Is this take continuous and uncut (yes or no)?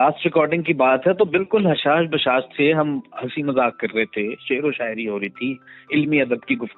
yes